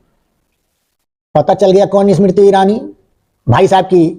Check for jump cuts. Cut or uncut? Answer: uncut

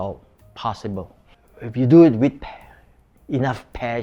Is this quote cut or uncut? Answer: uncut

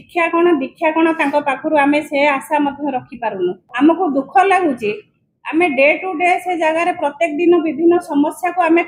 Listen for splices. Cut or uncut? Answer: cut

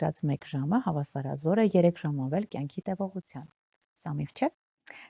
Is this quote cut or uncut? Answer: uncut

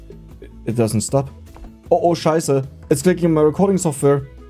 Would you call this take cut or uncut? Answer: cut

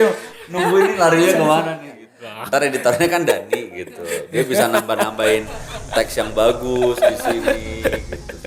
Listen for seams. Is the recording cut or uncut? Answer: cut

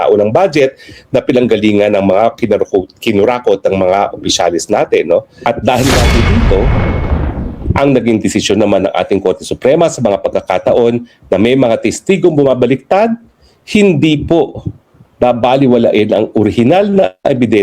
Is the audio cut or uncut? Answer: cut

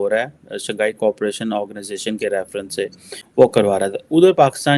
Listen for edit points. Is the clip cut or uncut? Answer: cut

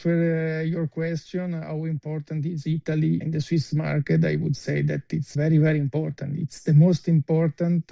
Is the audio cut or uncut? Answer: uncut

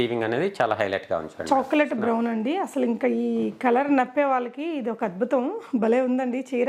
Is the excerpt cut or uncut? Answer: uncut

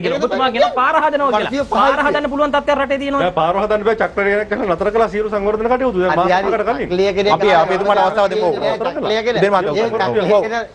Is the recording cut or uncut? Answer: uncut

